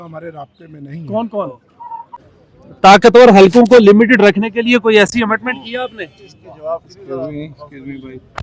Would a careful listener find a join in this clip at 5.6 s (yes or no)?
no